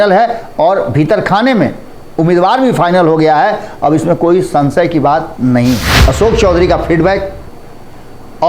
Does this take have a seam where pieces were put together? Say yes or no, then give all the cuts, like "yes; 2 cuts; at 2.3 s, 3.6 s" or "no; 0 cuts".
yes; 1 cut; at 5.9 s